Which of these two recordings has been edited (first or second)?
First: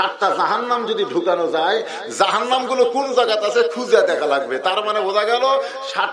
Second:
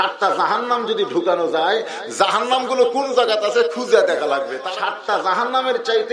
second